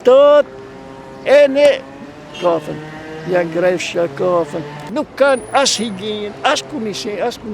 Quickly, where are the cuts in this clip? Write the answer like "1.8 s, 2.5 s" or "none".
4.9 s